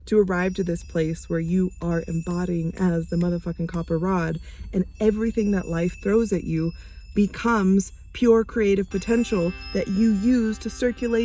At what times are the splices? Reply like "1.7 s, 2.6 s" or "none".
none